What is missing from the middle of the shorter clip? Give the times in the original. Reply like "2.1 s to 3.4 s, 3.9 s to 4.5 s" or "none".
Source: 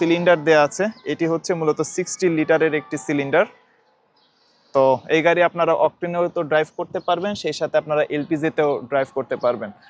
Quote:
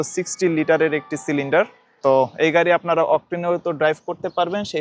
3.6 s to 4.5 s